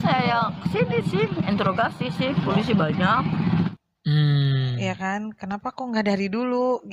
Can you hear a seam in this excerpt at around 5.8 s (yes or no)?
no